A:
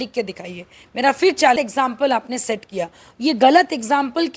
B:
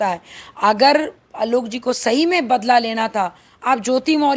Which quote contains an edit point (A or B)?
A